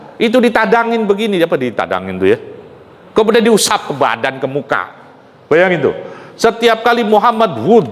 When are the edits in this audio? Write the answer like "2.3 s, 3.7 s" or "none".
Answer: none